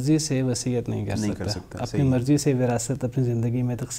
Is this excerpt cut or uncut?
uncut